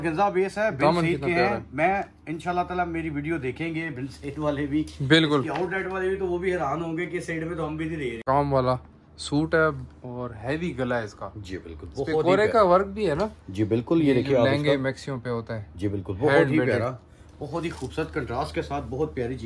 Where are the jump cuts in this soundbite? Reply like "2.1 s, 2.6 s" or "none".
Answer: 8.2 s